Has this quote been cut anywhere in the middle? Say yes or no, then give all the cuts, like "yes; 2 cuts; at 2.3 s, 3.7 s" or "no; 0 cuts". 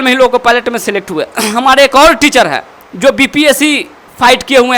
no; 0 cuts